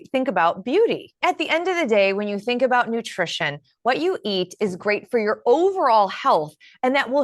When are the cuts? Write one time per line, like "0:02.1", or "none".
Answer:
0:01.1